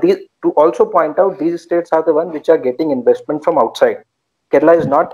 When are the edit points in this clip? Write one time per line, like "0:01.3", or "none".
none